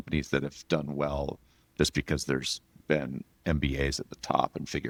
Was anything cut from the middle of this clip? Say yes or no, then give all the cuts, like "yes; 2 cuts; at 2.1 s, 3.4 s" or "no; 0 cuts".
no; 0 cuts